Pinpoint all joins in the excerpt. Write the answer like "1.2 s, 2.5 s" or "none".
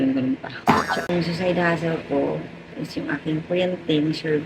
1.1 s